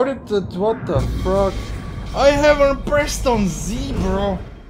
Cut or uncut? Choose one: uncut